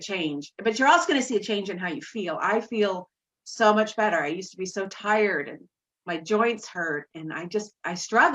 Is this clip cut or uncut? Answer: uncut